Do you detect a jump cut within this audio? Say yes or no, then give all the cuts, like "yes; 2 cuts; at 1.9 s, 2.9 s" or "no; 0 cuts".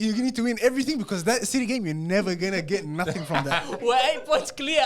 yes; 1 cut; at 3.7 s